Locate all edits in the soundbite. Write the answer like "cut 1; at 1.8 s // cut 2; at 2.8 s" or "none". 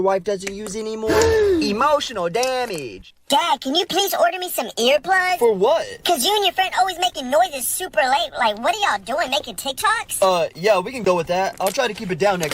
cut 1; at 3.2 s